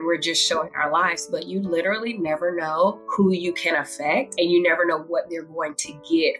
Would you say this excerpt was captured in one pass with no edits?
no; 2 cuts; at 3.0 s, 4.3 s

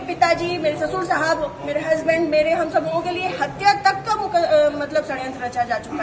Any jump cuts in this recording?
no; 0 cuts

